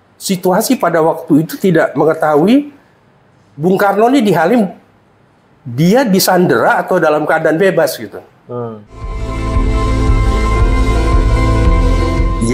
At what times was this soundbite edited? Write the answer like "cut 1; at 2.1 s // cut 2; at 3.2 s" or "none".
cut 1; at 9.3 s

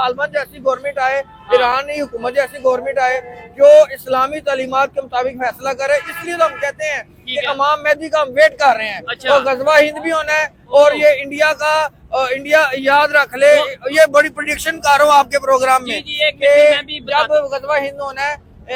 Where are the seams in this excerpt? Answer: none

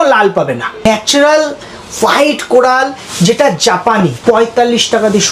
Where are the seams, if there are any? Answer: cut 1; at 0.9 s // cut 2; at 4.2 s

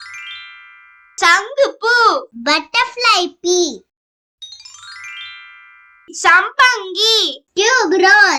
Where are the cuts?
none

